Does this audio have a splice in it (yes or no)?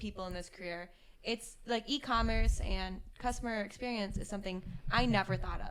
no